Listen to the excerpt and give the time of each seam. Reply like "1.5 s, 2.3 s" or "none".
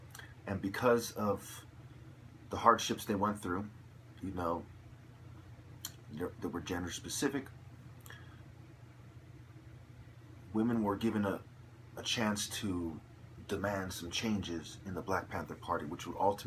none